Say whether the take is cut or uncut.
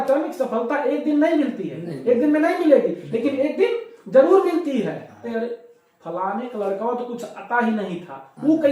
cut